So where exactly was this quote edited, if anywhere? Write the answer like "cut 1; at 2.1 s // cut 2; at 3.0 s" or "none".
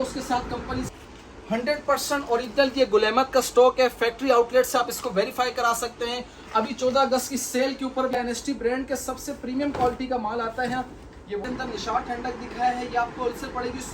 cut 1; at 0.9 s // cut 2; at 8.2 s // cut 3; at 11.4 s